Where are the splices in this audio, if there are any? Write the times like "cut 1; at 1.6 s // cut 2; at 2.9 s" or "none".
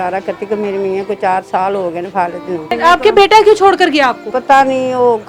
cut 1; at 2.7 s // cut 2; at 4.3 s